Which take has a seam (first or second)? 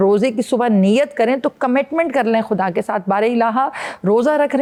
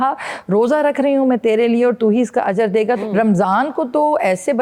second